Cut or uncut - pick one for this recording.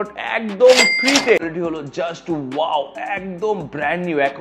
cut